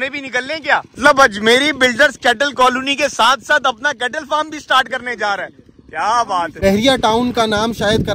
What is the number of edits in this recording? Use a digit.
2